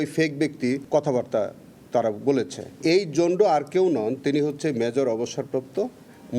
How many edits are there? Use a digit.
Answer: 2